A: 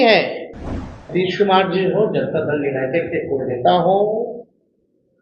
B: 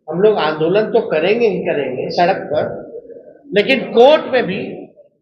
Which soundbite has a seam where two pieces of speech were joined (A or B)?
A